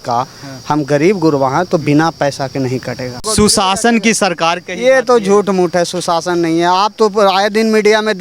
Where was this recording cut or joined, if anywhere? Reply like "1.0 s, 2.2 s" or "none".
3.2 s